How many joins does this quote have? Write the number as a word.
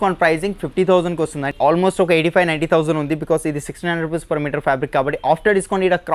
one